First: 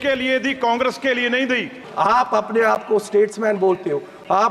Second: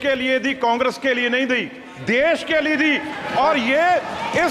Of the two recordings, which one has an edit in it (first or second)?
first